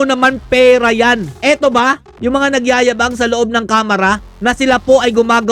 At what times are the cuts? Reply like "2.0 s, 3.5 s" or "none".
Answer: 1.3 s